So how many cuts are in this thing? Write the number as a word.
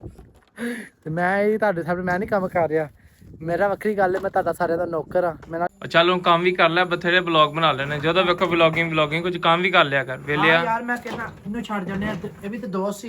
one